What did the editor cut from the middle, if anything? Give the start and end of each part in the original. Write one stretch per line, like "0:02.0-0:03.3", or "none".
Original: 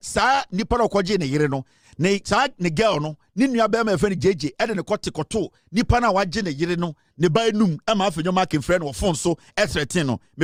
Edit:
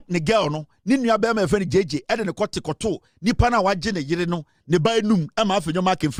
none